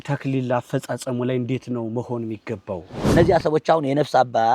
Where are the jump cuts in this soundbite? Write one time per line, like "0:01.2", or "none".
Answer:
0:02.9